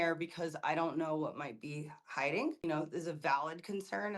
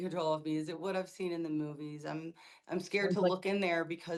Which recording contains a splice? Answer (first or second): first